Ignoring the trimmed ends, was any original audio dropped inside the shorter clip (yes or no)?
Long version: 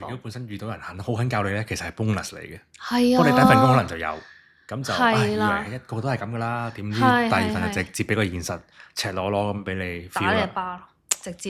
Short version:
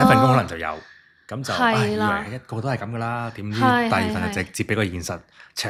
no